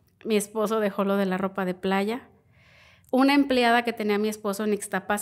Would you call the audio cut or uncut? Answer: uncut